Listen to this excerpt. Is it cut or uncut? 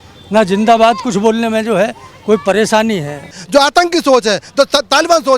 cut